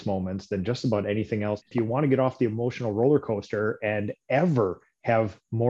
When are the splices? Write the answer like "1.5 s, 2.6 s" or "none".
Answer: 1.7 s

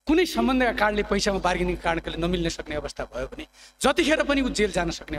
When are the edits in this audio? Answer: none

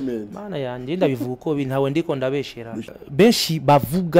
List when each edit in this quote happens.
2.9 s

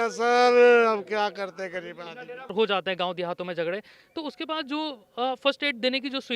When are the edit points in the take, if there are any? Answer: 2.5 s

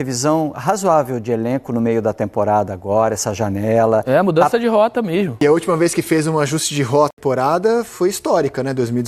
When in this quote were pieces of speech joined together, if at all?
5.4 s, 7.2 s

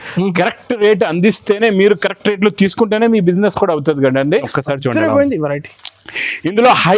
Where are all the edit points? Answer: 4.5 s

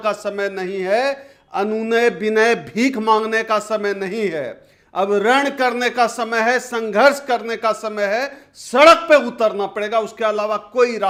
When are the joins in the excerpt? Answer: none

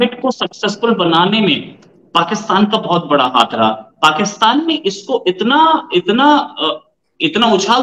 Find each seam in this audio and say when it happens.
none

